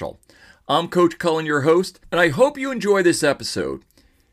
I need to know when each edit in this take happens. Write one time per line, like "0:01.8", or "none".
0:02.0